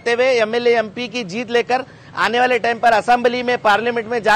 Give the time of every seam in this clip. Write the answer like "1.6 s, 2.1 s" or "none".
none